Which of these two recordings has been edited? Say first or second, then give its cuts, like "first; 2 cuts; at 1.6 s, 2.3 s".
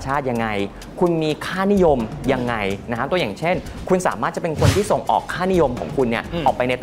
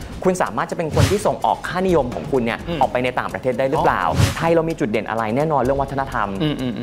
second; 1 cut; at 4.3 s